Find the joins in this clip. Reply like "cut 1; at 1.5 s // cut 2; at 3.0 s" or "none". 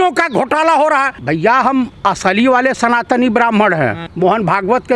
cut 1; at 1.2 s // cut 2; at 4.0 s